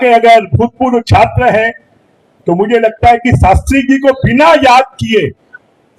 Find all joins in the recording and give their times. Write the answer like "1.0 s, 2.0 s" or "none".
none